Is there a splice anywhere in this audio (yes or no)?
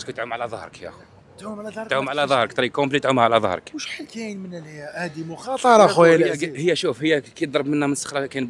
no